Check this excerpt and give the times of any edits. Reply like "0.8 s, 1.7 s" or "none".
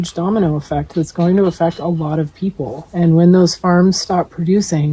2.8 s